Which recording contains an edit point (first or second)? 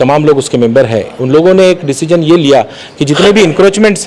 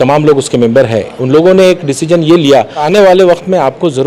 second